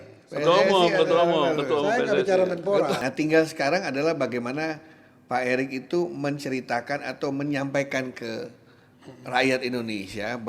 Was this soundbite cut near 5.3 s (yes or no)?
no